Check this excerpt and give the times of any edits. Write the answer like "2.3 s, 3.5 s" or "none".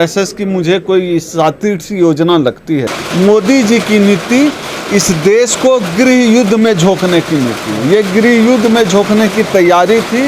3.0 s